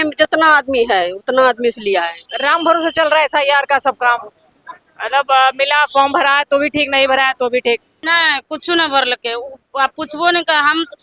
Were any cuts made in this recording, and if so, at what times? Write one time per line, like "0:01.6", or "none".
0:02.2
0:08.0